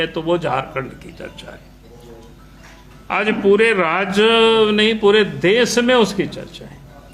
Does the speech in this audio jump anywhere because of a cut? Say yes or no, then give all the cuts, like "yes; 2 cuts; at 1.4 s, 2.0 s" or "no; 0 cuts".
no; 0 cuts